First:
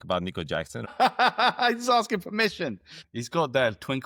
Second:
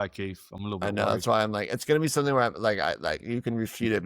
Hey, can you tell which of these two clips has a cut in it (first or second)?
first